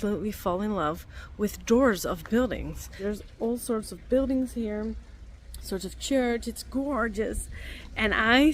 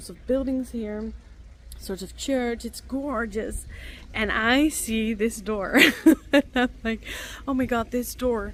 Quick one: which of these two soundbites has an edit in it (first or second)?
first